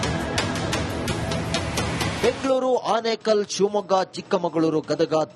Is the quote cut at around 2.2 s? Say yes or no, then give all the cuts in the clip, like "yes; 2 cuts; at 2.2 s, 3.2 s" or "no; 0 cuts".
yes; 1 cut; at 2.2 s